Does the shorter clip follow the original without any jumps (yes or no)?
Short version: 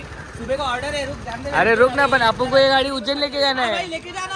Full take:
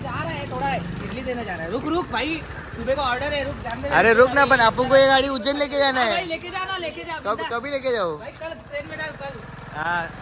yes